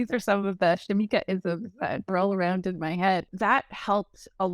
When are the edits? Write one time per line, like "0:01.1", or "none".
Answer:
0:03.3